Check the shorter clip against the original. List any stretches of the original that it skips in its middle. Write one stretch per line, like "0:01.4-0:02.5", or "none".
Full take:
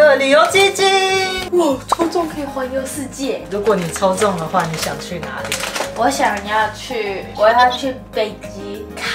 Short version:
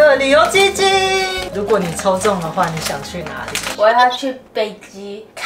0:01.4-0:03.4
0:05.6-0:07.2